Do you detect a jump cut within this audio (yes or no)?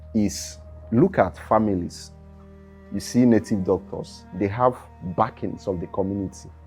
no